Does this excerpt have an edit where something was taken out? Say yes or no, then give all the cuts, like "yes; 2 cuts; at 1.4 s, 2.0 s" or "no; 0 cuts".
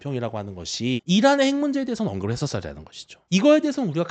yes; 1 cut; at 1.0 s